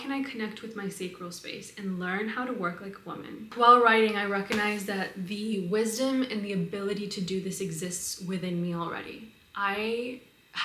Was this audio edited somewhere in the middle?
yes; 1 cut; at 3.4 s

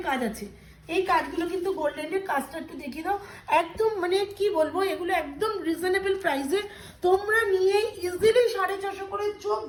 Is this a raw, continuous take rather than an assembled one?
yes; 0 cuts

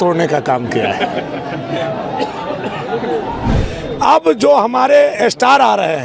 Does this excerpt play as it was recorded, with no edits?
no; 1 cut; at 3.6 s

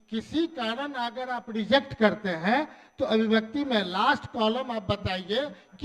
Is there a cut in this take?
no; 0 cuts

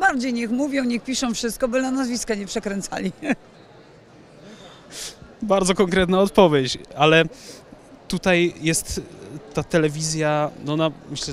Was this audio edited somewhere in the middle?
no; 0 cuts

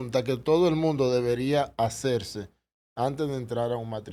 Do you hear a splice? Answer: no; 0 cuts

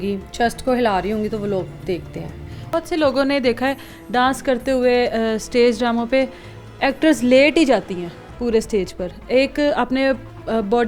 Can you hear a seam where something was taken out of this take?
no; 0 cuts

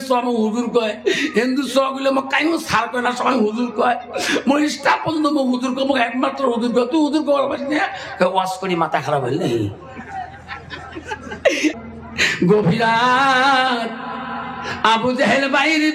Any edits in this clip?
yes; 1 cut; at 11.8 s

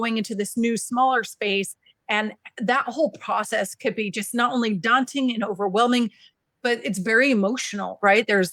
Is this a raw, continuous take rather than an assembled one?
yes; 0 cuts

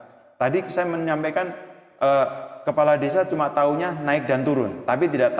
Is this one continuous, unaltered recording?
yes; 0 cuts

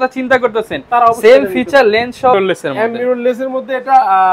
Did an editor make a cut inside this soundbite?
yes; 1 cut; at 2.3 s

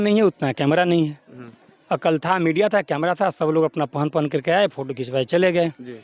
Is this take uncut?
yes; 0 cuts

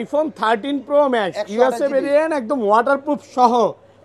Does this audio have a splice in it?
no; 0 cuts

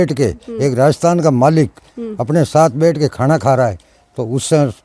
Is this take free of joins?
yes; 0 cuts

